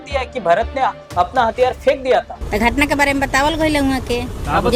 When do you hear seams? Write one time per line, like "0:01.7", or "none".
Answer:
0:02.4